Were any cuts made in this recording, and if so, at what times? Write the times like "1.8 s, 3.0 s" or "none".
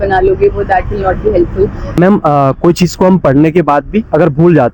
2.0 s